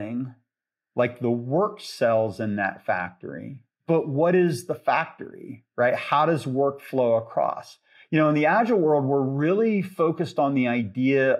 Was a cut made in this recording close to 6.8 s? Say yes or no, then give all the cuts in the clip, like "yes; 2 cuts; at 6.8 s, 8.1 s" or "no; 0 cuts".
no; 1 cut; at 3.7 s